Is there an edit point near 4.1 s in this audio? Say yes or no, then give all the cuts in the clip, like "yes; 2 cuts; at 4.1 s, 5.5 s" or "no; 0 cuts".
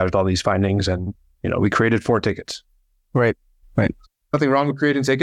yes; 1 cut; at 4.1 s